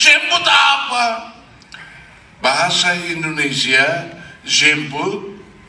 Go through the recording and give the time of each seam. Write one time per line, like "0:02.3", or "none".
none